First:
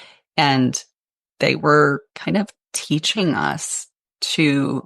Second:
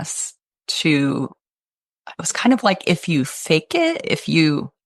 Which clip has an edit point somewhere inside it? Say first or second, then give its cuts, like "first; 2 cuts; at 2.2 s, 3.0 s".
first; 1 cut; at 2.1 s